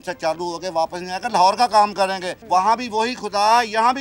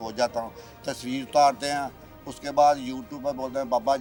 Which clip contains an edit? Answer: first; 1 cut; at 2.3 s

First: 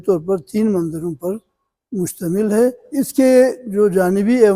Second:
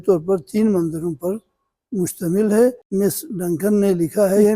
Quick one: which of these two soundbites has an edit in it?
second; 1 cut; at 2.8 s

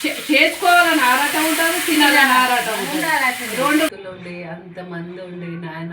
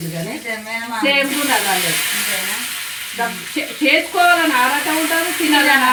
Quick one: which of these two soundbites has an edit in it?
first; 1 cut; at 3.9 s

